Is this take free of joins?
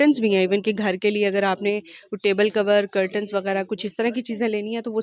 yes; 0 cuts

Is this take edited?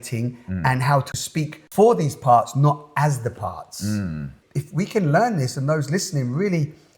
yes; 2 cuts; at 1.2 s, 4.4 s

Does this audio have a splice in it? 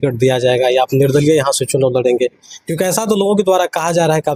no; 0 cuts

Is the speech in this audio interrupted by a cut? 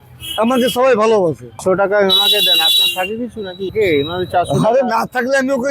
yes; 2 cuts; at 1.6 s, 3.7 s

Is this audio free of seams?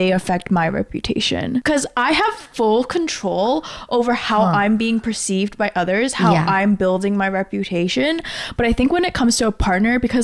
no; 1 cut; at 1.6 s

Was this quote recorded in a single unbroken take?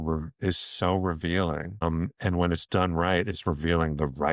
no; 1 cut; at 1.8 s

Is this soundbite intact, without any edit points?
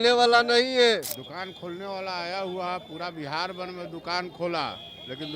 no; 1 cut; at 1.2 s

